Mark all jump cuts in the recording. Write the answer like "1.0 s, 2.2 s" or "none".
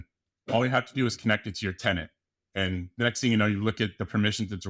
none